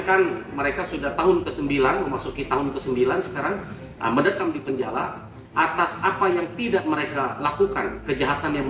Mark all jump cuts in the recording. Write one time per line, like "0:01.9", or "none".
none